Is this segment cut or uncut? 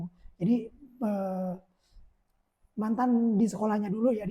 uncut